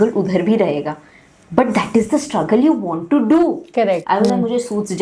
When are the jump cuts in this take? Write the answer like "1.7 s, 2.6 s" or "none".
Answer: 4.0 s